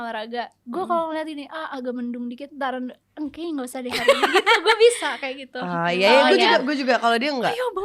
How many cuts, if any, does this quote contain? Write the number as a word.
zero